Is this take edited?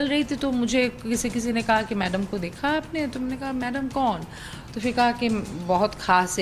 yes; 1 cut; at 5.5 s

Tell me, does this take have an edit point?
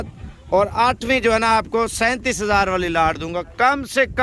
no; 0 cuts

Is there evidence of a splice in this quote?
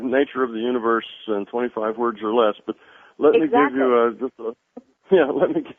yes; 1 cut; at 2.4 s

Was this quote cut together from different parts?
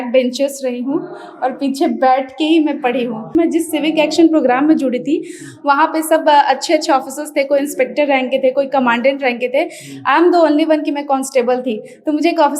yes; 1 cut; at 3.3 s

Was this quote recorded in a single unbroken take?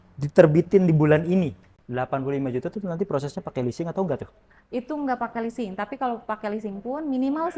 no; 1 cut; at 1.7 s

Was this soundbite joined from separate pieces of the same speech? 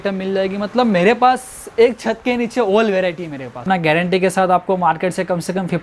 yes; 1 cut; at 3.6 s

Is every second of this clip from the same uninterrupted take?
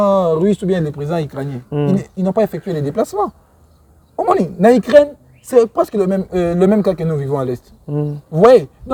yes; 0 cuts

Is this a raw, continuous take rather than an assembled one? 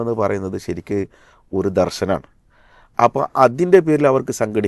yes; 0 cuts

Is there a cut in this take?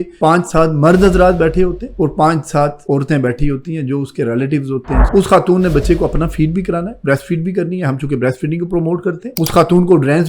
yes; 1 cut; at 5.1 s

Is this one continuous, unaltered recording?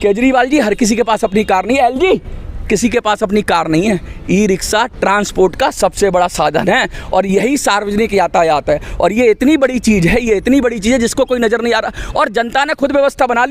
yes; 0 cuts

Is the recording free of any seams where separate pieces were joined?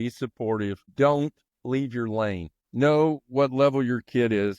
no; 3 cuts; at 0.8 s, 1.5 s, 2.5 s

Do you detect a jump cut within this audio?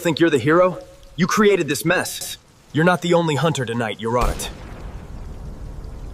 yes; 1 cut; at 2.1 s

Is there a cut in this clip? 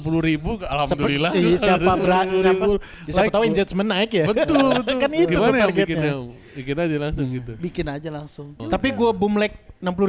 yes; 1 cut; at 8.6 s

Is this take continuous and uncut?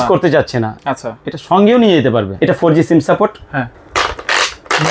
no; 2 cuts; at 2.3 s, 3.8 s

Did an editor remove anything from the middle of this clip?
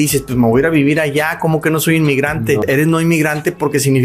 yes; 1 cut; at 2.6 s

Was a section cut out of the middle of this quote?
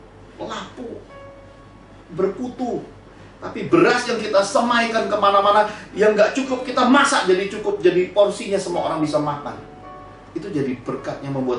no; 0 cuts

